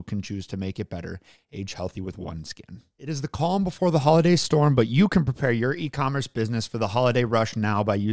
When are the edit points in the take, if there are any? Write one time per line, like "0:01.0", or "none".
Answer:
0:03.0

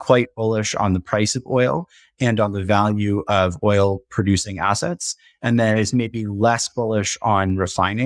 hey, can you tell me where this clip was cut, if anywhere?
none

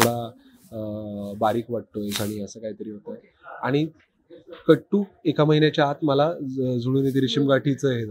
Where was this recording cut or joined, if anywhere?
none

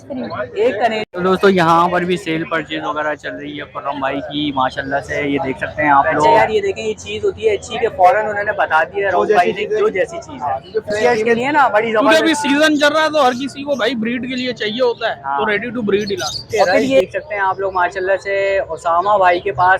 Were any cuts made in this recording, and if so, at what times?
0:01.0
0:06.4
0:11.1
0:17.0

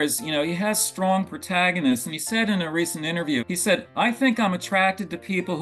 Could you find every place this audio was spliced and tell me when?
0:03.4

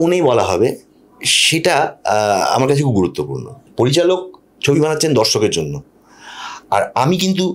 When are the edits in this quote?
none

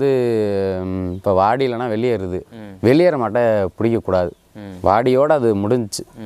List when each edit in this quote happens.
none

